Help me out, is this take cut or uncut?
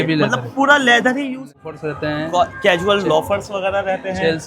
cut